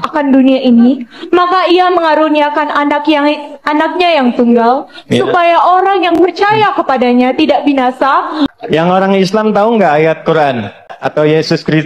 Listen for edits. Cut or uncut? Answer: cut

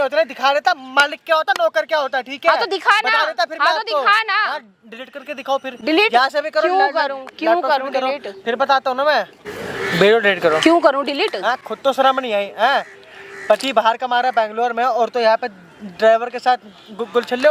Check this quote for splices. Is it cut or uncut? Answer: uncut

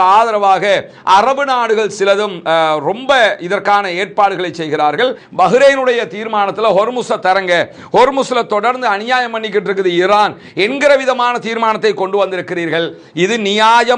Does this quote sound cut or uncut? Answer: cut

